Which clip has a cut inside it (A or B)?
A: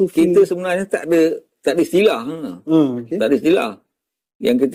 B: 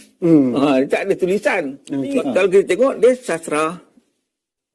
B